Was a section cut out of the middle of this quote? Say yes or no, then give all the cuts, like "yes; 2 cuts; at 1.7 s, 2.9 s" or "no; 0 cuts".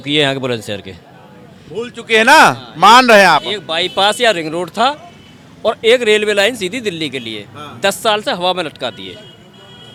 no; 0 cuts